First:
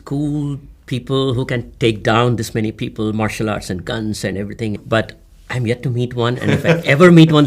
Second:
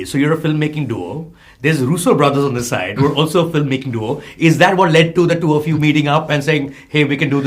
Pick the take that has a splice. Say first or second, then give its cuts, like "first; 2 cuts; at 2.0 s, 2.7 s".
first; 1 cut; at 4.8 s